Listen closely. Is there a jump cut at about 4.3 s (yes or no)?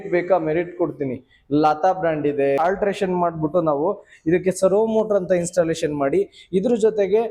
no